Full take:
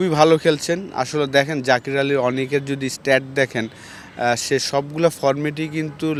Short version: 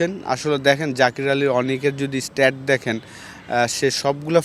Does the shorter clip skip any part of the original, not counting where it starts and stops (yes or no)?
no